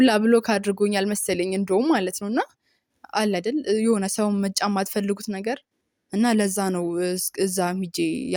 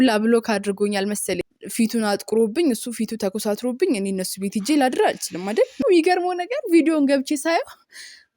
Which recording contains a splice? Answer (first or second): second